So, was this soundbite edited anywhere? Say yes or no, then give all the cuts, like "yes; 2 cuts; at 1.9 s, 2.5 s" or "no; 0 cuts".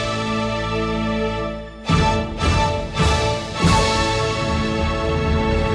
no; 0 cuts